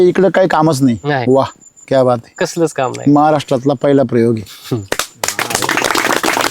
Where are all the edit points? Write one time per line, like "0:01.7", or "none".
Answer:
0:01.2